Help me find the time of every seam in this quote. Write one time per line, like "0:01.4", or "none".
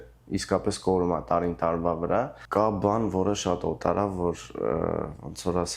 0:02.4